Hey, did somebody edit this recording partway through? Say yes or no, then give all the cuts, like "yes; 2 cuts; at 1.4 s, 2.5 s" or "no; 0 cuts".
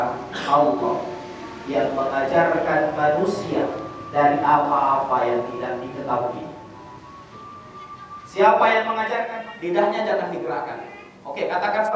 yes; 1 cut; at 9.2 s